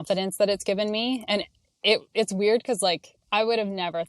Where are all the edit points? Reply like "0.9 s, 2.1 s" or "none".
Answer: 3.1 s